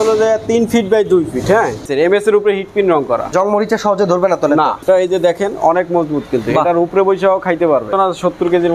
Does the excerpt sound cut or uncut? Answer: cut